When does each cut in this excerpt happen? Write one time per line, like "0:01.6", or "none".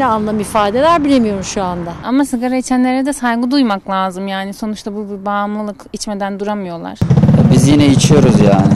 0:02.0
0:06.9